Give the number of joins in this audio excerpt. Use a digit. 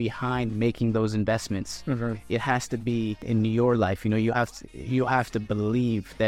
1